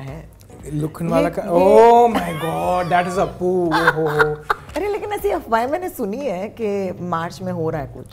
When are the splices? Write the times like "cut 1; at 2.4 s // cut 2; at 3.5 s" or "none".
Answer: cut 1; at 4.7 s